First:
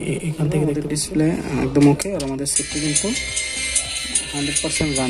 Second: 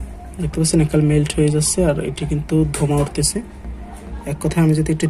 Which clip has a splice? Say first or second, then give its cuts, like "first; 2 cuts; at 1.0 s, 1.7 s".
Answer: first; 1 cut; at 0.9 s